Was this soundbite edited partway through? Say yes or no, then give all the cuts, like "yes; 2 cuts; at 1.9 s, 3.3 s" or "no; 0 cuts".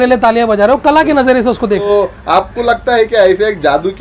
yes; 1 cut; at 1.8 s